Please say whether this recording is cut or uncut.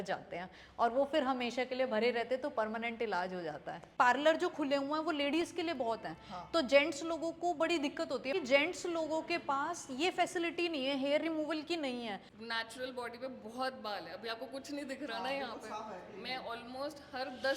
cut